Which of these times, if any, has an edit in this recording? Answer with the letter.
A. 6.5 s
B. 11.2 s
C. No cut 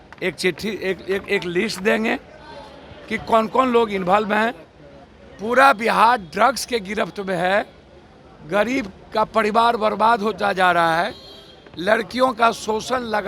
C